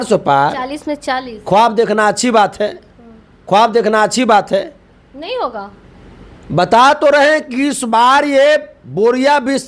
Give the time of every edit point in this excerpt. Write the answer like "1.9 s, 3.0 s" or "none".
none